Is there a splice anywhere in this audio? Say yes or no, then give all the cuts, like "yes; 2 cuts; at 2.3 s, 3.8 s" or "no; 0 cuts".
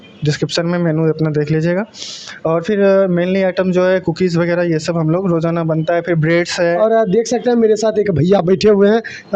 no; 0 cuts